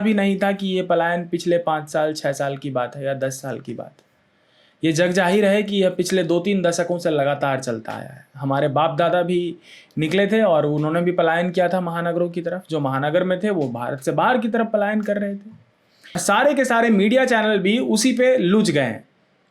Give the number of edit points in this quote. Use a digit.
1